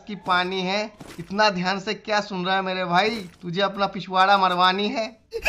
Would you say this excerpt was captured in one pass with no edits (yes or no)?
yes